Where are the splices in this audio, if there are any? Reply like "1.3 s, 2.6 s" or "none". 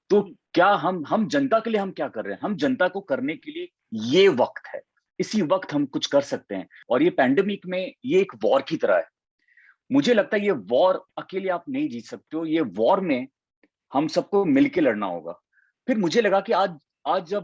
6.8 s